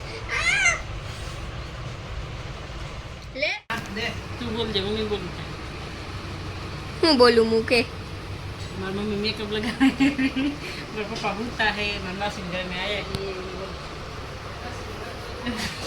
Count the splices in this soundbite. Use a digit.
1